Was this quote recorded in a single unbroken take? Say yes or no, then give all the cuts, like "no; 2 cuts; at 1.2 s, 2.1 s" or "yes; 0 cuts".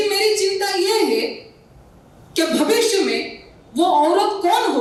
yes; 0 cuts